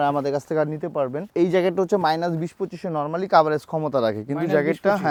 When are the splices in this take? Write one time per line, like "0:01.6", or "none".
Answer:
none